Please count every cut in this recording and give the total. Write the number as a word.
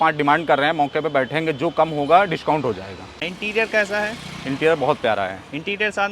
one